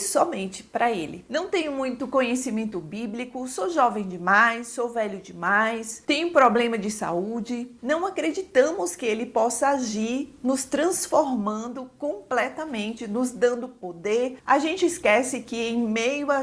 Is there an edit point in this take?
yes; 3 cuts; at 1.2 s, 7.7 s, 14.4 s

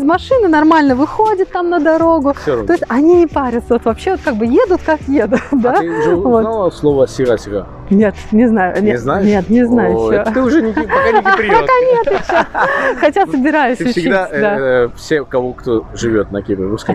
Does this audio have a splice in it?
no; 0 cuts

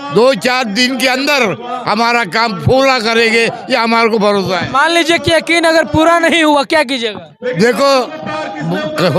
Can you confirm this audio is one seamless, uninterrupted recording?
yes; 0 cuts

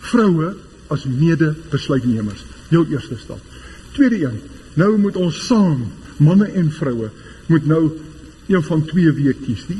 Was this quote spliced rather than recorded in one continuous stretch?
yes; 1 cut; at 6.0 s

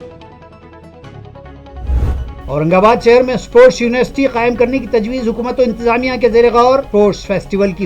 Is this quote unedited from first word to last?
no; 1 cut; at 2.1 s

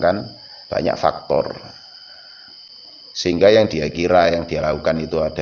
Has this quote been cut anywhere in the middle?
yes; 1 cut; at 2.7 s

